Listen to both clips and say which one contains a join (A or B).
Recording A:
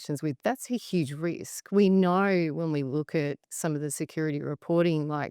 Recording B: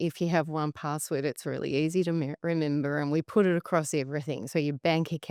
A